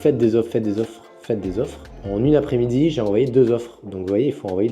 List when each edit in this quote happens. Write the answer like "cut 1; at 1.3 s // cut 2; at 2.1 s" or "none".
cut 1; at 1.9 s